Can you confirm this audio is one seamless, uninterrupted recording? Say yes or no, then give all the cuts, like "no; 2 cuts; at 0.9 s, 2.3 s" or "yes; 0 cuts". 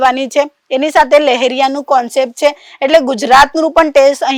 yes; 0 cuts